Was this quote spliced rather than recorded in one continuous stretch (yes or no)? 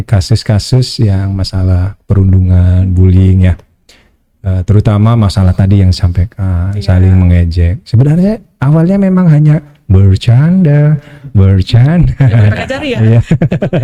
no